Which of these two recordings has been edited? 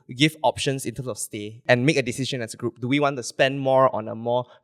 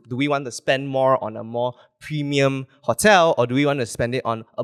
first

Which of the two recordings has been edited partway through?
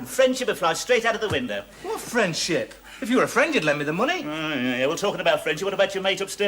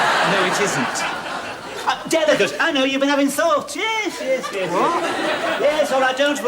second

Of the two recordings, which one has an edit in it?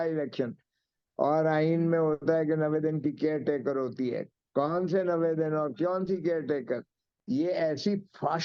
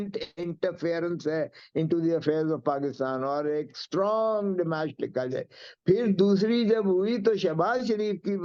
first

